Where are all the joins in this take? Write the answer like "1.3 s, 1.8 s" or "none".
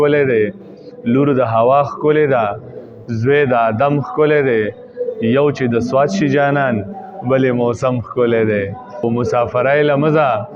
9.0 s